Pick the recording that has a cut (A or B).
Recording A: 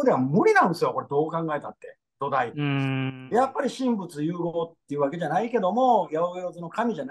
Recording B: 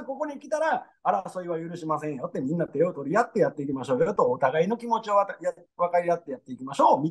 A